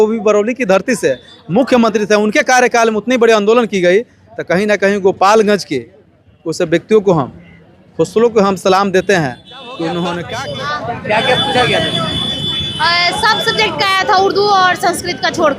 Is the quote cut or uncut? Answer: cut